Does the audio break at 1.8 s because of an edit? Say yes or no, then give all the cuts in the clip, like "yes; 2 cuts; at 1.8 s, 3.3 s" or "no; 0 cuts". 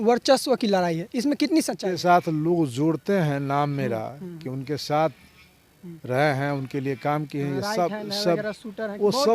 yes; 1 cut; at 1.8 s